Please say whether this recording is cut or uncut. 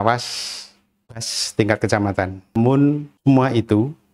cut